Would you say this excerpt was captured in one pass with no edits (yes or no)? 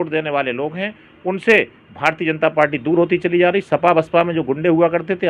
yes